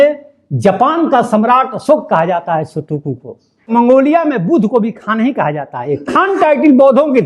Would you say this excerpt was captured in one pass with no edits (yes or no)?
no